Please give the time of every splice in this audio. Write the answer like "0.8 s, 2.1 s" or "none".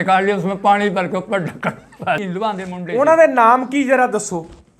2.3 s